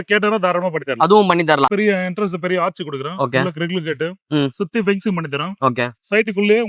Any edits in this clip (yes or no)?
yes